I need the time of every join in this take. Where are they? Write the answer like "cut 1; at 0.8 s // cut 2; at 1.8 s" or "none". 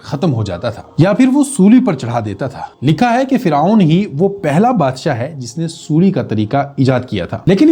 none